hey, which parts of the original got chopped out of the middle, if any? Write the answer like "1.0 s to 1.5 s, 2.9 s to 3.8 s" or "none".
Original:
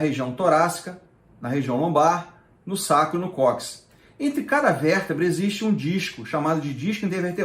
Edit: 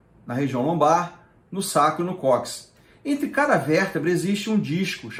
none